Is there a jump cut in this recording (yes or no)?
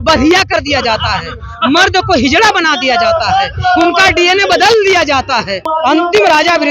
yes